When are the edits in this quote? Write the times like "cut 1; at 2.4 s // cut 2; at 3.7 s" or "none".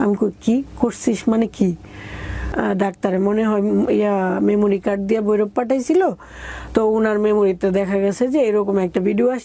cut 1; at 2.5 s